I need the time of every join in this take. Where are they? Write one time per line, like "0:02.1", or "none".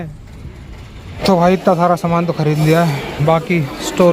0:01.1